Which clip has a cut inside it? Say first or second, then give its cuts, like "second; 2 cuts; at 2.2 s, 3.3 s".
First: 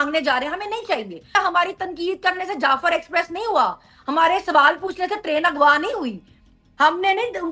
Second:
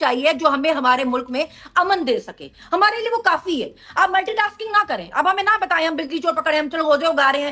first; 1 cut; at 1.3 s